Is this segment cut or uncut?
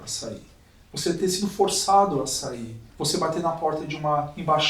cut